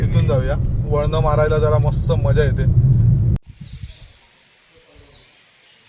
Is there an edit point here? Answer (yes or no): yes